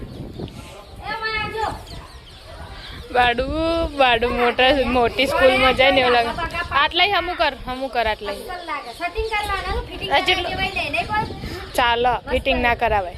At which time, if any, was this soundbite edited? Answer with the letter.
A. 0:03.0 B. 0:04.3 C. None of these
C